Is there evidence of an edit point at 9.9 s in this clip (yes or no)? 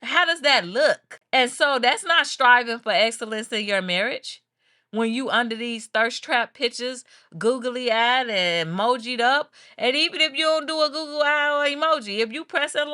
no